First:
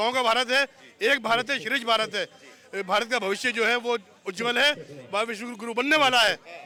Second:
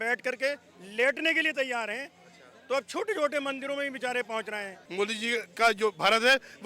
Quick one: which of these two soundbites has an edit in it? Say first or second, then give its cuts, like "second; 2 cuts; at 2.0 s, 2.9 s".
second; 1 cut; at 4.8 s